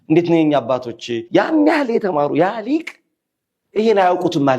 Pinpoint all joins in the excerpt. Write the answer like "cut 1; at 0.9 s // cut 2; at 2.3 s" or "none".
cut 1; at 1.2 s